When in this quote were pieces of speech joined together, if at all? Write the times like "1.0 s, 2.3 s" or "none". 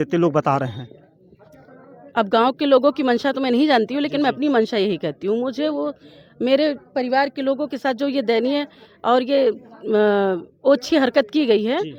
none